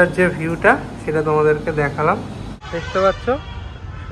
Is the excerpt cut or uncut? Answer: cut